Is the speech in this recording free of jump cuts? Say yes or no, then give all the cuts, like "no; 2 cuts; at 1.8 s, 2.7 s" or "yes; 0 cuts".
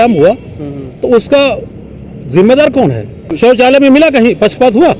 no; 1 cut; at 3.2 s